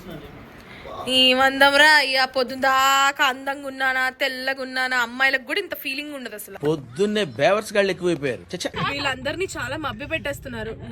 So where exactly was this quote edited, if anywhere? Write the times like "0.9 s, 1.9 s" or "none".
8.7 s